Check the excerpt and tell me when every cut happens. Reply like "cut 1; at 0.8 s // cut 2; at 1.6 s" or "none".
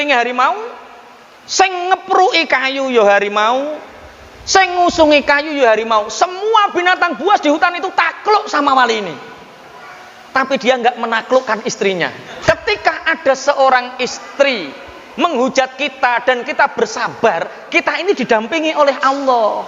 cut 1; at 12.3 s